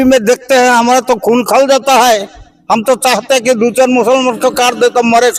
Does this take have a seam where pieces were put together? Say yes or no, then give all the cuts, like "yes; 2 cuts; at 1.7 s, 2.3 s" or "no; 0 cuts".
no; 0 cuts